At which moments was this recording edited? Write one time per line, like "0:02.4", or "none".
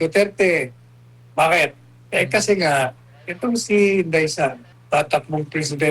0:04.7